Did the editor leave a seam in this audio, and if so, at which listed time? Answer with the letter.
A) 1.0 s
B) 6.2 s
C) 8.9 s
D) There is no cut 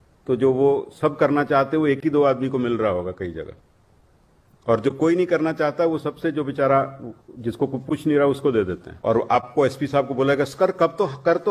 C